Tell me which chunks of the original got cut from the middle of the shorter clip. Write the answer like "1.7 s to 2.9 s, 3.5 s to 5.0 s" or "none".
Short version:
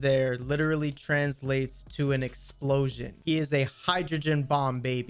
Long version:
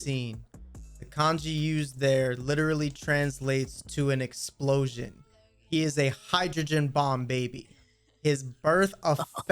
5.1 s to 5.5 s